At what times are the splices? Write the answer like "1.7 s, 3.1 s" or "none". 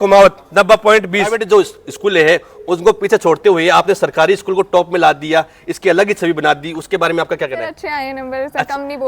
1.4 s, 7.8 s